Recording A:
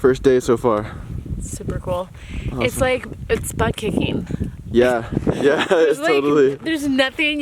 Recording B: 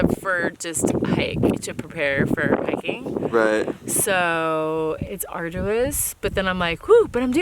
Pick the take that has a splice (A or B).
B